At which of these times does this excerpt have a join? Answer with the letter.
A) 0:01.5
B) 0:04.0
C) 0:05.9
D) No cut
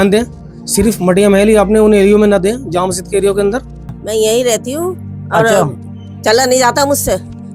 B